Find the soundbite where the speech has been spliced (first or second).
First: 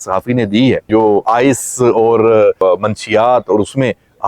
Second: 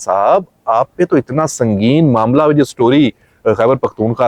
first